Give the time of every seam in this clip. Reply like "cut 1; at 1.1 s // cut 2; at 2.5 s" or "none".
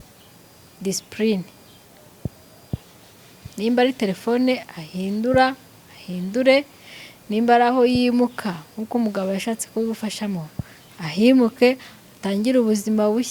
none